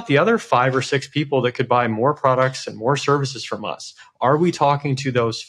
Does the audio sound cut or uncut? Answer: uncut